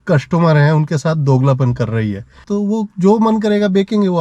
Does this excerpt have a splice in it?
yes; 1 cut; at 2.4 s

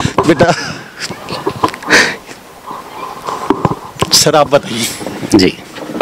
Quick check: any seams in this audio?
no; 0 cuts

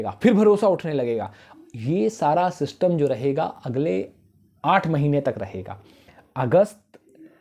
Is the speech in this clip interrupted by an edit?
no; 0 cuts

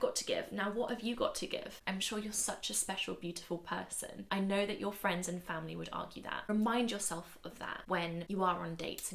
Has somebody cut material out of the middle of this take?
yes; 4 cuts; at 1.8 s, 4.2 s, 6.5 s, 8.1 s

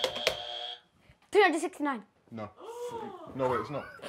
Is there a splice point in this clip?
no; 0 cuts

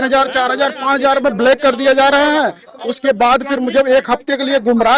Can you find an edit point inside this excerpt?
no; 0 cuts

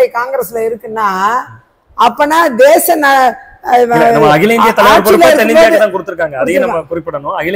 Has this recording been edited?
no; 0 cuts

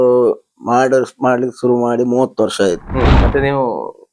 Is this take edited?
yes; 1 cut; at 3.1 s

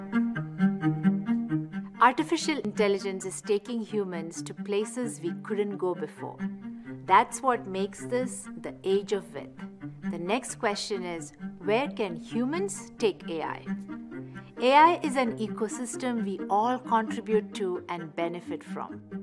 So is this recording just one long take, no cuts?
no; 1 cut; at 2.7 s

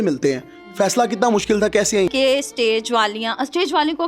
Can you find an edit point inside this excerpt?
yes; 1 cut; at 2.1 s

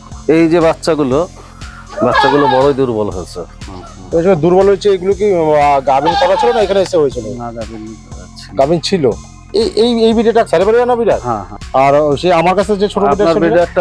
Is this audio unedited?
no; 3 cuts; at 9.3 s, 10.5 s, 11.5 s

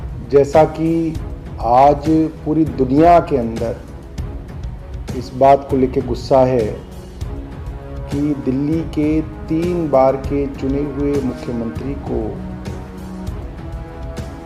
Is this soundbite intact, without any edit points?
yes; 0 cuts

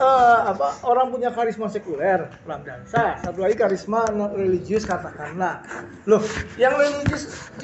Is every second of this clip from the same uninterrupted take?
yes; 0 cuts

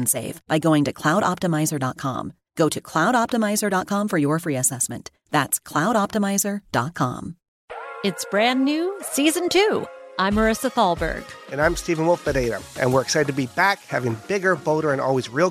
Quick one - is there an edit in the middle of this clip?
yes; 1 cut; at 7.4 s

